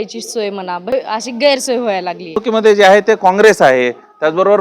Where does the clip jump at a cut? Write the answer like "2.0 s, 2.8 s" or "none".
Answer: 0.9 s, 2.4 s